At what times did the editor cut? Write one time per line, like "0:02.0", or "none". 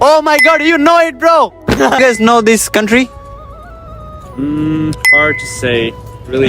0:02.0